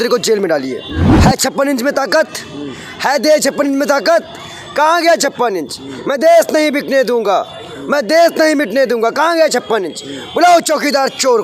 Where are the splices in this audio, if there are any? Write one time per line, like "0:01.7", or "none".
0:01.0